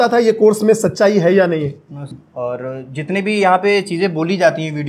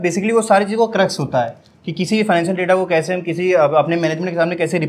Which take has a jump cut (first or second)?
first